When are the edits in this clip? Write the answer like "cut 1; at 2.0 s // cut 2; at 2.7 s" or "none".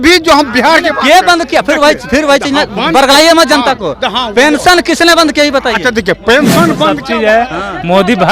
cut 1; at 6.9 s